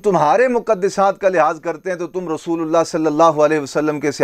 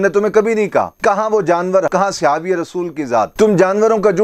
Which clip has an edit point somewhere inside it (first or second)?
second